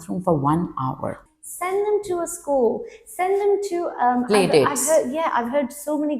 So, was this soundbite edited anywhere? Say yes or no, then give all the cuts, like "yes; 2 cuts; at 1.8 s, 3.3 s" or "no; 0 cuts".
yes; 1 cut; at 1.2 s